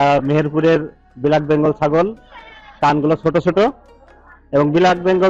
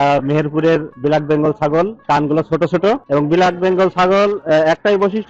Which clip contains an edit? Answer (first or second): second